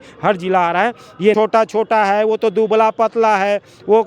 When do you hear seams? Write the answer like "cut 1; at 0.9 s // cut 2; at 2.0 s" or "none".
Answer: cut 1; at 1.3 s